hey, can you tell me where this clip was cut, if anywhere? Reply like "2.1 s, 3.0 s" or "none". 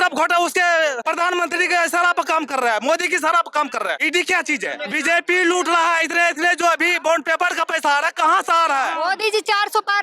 1.0 s, 4.0 s, 4.8 s, 9.0 s